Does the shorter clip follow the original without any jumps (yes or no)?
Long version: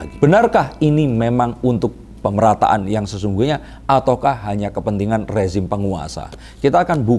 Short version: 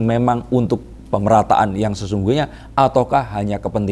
yes